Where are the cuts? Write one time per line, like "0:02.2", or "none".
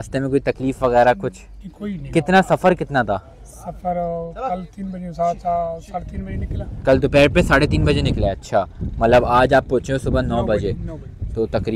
none